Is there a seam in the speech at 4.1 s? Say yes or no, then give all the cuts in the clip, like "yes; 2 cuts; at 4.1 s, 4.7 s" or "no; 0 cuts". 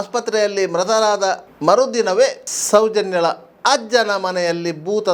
no; 2 cuts; at 1.5 s, 2.5 s